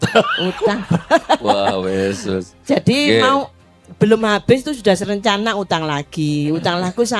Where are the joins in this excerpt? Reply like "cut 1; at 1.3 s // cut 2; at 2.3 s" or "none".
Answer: none